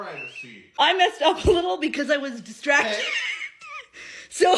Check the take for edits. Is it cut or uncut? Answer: uncut